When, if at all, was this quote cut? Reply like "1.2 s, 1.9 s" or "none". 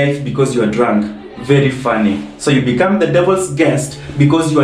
none